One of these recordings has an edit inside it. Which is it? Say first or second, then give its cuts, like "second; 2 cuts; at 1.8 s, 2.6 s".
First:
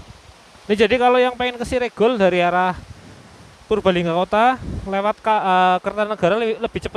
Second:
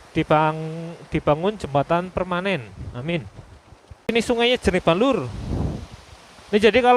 second; 1 cut; at 4.1 s